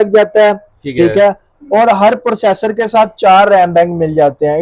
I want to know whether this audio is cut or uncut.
uncut